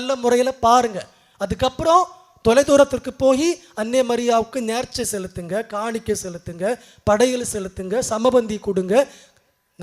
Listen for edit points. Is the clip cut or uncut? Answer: uncut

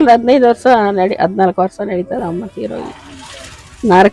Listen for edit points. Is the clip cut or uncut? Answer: uncut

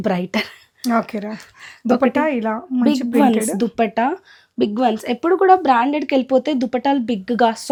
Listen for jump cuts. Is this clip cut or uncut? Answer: uncut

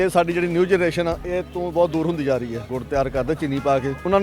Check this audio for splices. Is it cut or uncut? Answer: cut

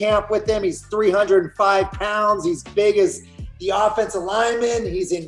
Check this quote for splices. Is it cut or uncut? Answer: uncut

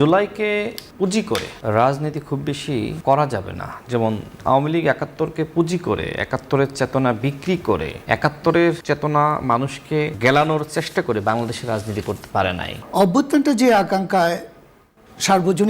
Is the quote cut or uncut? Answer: cut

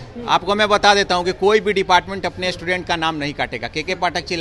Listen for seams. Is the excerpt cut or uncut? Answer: uncut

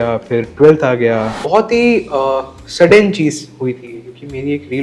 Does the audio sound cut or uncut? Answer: cut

